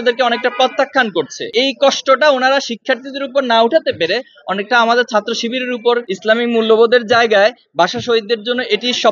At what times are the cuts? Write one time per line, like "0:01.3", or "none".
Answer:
0:01.4
0:06.1